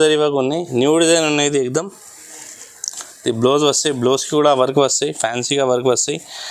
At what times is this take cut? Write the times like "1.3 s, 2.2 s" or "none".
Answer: none

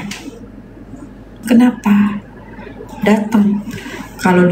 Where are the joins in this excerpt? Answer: none

